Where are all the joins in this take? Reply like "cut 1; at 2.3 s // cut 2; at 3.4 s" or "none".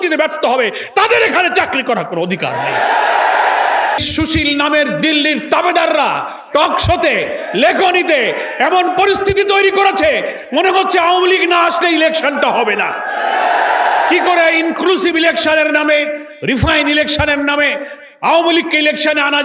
cut 1; at 4.0 s

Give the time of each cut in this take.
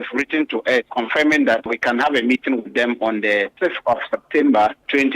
cut 1; at 0.9 s // cut 2; at 3.5 s

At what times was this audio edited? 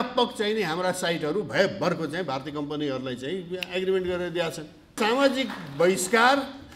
cut 1; at 4.9 s

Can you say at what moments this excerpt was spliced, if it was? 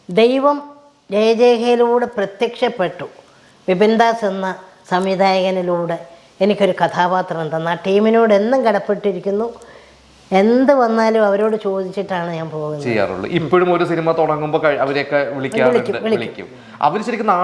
none

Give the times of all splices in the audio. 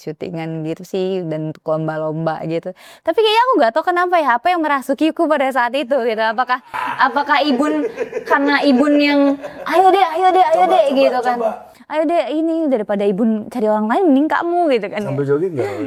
none

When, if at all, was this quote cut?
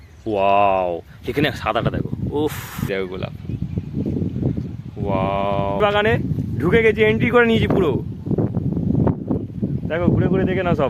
cut 1; at 2.9 s // cut 2; at 5.8 s

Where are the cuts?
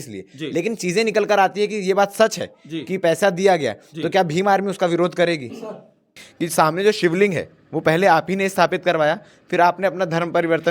cut 1; at 6.2 s

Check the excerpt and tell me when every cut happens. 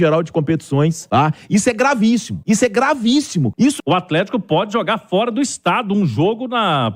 cut 1; at 1.0 s // cut 2; at 2.3 s // cut 3; at 3.7 s

